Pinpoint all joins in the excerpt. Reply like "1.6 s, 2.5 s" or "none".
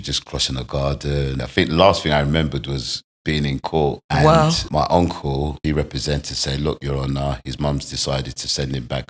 1.4 s, 4.0 s, 4.6 s, 5.6 s